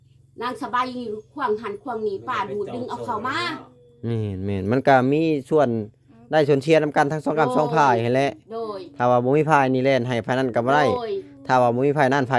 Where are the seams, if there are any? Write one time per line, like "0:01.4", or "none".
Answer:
none